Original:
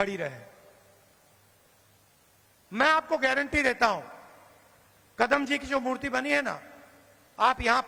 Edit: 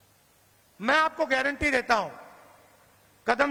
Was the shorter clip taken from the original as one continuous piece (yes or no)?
yes